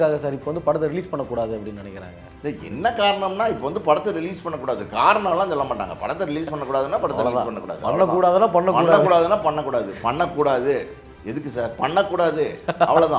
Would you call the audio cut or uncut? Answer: uncut